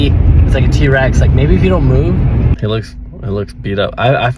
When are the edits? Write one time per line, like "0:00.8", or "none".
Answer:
0:02.5